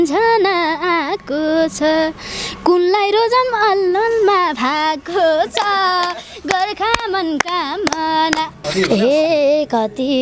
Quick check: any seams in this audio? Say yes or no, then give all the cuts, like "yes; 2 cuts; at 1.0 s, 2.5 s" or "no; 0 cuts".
yes; 1 cut; at 8.7 s